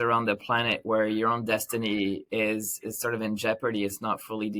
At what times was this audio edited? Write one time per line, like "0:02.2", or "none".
none